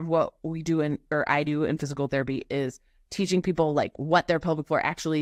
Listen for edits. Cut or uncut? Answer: uncut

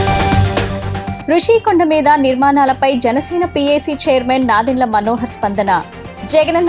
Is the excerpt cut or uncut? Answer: cut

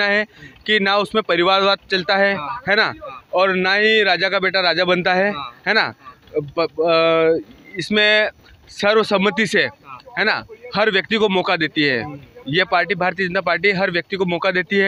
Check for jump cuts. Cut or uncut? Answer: uncut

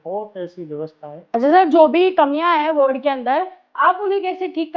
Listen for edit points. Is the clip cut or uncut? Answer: cut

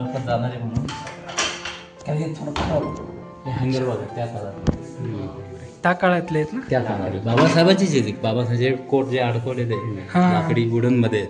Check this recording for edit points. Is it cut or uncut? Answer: uncut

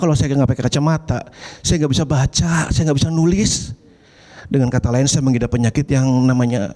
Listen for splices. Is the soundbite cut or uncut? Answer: uncut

